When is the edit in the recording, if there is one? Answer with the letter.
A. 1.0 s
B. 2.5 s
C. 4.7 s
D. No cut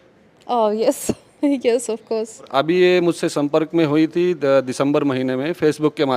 B